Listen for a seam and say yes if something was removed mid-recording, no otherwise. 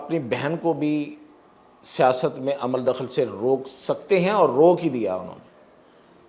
no